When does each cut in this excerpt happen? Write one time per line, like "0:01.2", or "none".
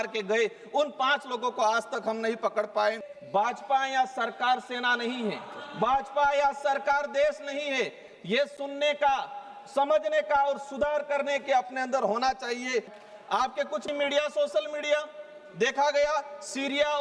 0:03.1
0:13.0